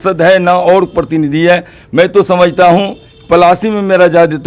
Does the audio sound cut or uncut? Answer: uncut